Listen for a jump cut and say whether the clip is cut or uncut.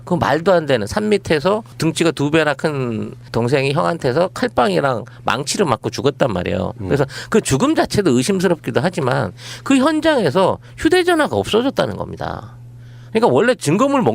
cut